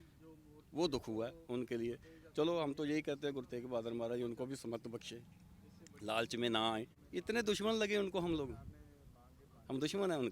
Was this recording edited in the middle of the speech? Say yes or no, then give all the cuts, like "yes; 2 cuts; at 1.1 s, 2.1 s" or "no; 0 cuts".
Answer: yes; 1 cut; at 7.0 s